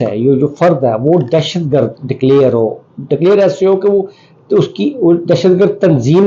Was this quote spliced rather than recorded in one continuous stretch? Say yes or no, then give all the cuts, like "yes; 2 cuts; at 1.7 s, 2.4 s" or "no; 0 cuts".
no; 0 cuts